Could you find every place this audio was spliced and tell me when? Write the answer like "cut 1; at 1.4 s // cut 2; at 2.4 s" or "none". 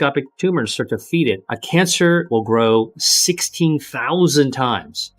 cut 1; at 1.5 s // cut 2; at 2.3 s // cut 3; at 3.9 s